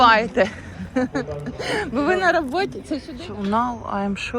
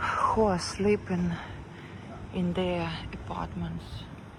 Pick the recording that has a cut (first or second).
first